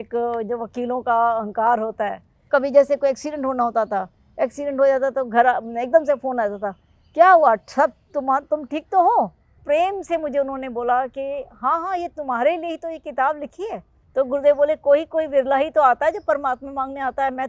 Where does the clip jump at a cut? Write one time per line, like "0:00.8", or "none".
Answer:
0:02.5
0:09.6
0:13.9